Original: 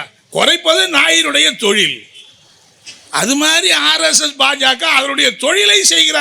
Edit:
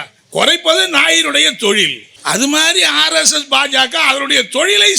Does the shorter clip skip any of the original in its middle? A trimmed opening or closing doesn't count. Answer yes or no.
yes